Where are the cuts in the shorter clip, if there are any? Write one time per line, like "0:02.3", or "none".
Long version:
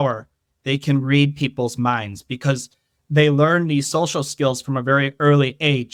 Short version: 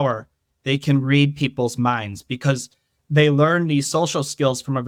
none